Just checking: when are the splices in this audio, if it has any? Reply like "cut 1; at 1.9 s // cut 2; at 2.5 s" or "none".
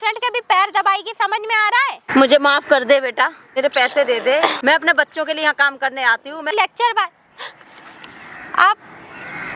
cut 1; at 2.0 s // cut 2; at 3.4 s // cut 3; at 4.6 s // cut 4; at 6.5 s